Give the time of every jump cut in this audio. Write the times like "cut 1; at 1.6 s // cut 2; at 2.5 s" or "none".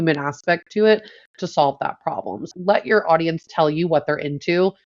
cut 1; at 2.4 s // cut 2; at 3.4 s